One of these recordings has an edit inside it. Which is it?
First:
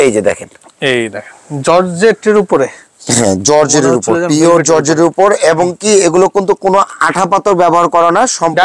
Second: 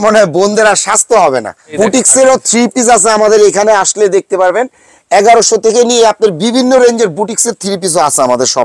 second; 1 cut; at 1.6 s

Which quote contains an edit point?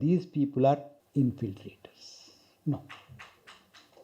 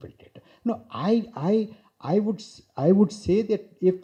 first; 1 cut; at 1.0 s

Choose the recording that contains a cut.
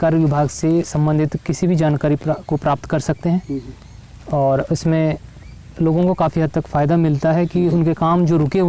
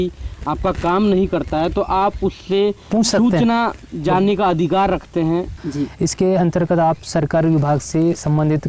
second; 1 cut; at 5.6 s

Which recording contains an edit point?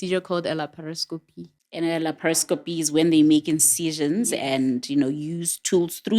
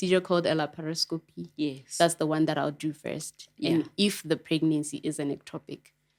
first; 1 cut; at 1.4 s

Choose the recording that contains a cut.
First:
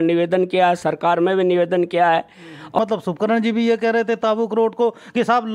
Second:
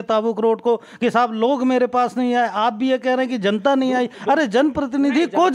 first; 1 cut; at 2.8 s

